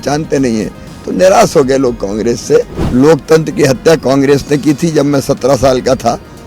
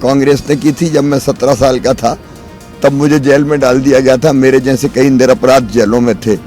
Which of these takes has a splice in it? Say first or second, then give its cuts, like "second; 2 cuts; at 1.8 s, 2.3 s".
first; 1 cut; at 2.8 s